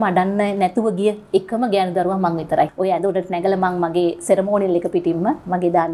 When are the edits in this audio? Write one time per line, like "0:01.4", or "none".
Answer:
0:02.7